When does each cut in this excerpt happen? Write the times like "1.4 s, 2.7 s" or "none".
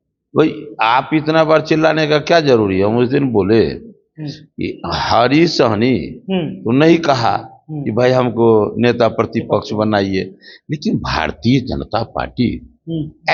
none